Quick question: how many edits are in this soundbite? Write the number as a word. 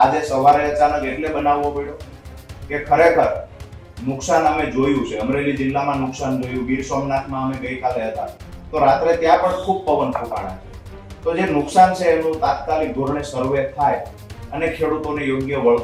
zero